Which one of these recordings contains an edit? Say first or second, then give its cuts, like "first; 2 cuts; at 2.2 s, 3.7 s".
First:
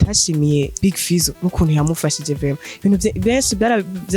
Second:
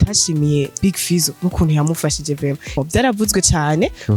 second; 1 cut; at 2.8 s